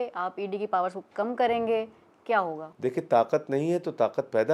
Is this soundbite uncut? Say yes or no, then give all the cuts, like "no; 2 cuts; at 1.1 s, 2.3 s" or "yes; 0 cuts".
no; 1 cut; at 2.6 s